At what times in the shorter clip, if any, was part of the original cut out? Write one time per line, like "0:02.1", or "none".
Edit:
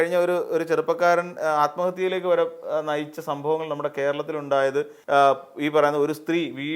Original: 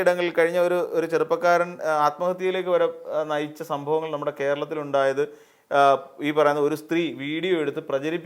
0:05.0